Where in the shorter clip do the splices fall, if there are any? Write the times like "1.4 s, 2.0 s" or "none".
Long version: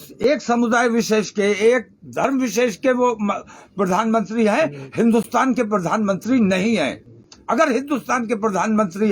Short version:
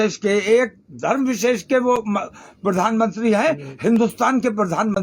none